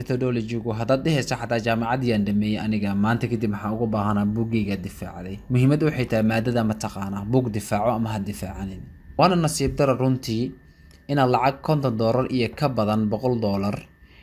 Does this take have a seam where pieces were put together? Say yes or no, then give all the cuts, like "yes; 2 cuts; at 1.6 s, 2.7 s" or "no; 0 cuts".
yes; 1 cut; at 9.2 s